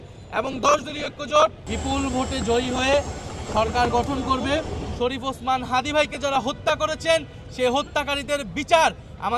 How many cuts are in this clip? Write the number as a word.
two